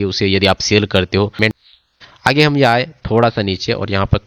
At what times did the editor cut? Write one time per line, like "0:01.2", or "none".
0:01.5